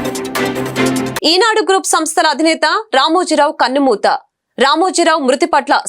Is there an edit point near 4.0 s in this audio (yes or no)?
no